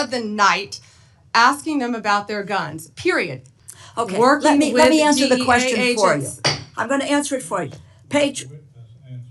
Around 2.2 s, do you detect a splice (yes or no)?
no